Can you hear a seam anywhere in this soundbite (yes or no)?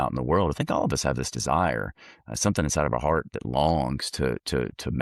no